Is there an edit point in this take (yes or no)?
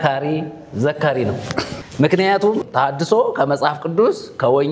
yes